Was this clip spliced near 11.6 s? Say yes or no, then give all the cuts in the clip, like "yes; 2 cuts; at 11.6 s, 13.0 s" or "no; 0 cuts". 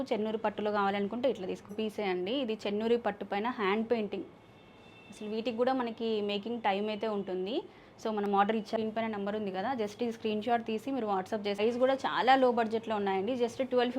yes; 3 cuts; at 1.7 s, 8.7 s, 11.6 s